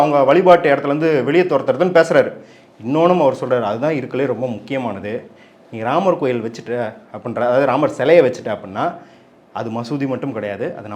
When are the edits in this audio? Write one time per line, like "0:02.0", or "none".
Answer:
none